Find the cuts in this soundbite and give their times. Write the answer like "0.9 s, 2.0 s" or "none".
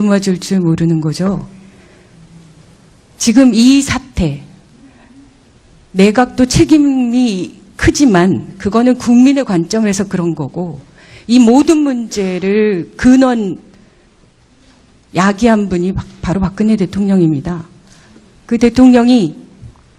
11.4 s

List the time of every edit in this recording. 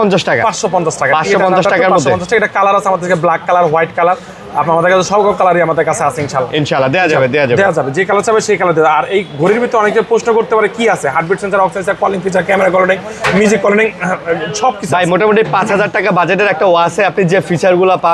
none

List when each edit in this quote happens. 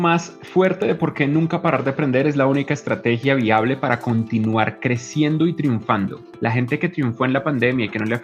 6.2 s

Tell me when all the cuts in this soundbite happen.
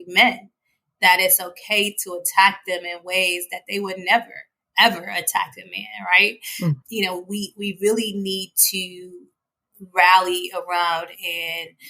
6.8 s

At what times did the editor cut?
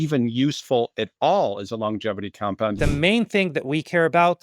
2.7 s

